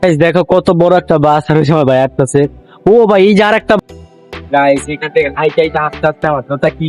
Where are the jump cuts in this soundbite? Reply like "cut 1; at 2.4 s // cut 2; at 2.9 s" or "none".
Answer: cut 1; at 3.8 s